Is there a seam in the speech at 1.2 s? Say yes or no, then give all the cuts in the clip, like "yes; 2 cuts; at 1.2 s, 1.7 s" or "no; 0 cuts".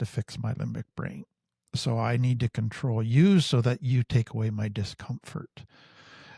no; 0 cuts